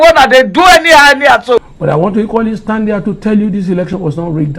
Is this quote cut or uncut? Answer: cut